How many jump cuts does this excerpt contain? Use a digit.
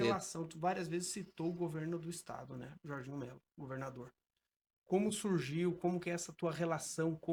0